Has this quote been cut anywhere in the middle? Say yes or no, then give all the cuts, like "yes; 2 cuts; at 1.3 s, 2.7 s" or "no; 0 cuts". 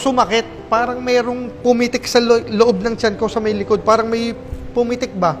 no; 0 cuts